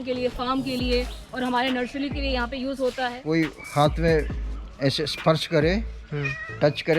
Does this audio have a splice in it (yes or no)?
yes